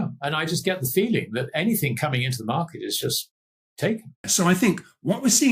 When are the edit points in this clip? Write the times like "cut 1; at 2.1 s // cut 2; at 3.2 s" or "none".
cut 1; at 4.3 s